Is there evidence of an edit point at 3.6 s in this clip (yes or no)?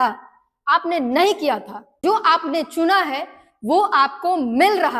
no